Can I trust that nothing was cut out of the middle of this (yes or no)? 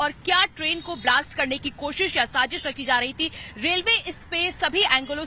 no